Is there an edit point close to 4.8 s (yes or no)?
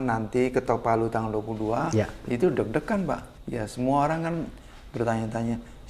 no